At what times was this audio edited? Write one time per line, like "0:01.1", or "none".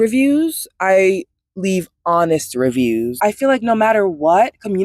0:03.2